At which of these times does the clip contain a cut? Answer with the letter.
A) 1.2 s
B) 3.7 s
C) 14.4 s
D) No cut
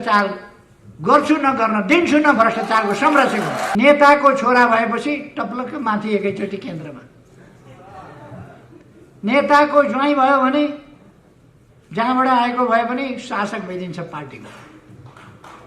B